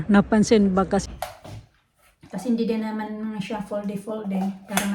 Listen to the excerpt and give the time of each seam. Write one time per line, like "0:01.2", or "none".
0:01.0